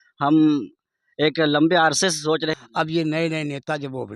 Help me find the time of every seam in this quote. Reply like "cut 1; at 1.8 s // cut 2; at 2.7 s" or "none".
cut 1; at 2.6 s

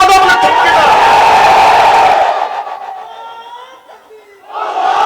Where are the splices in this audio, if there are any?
none

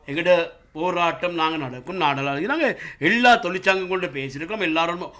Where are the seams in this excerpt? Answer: none

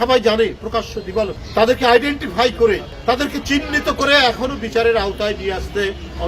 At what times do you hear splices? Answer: cut 1; at 1.4 s // cut 2; at 2.9 s

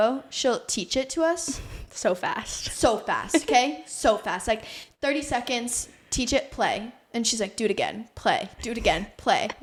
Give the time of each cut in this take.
none

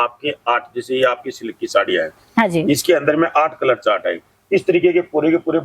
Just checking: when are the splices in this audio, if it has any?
none

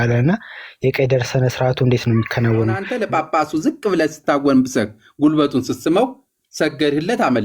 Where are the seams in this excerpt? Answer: cut 1; at 2.9 s

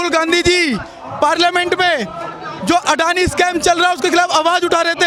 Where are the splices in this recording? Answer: none

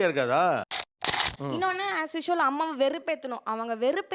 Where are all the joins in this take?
cut 1; at 1.2 s

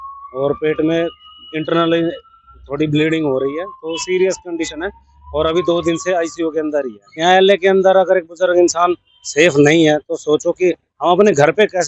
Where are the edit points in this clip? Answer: cut 1; at 7.2 s

